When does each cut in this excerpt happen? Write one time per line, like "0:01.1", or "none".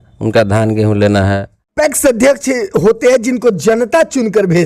0:01.7